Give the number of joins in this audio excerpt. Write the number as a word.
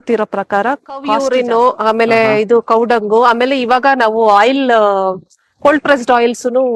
one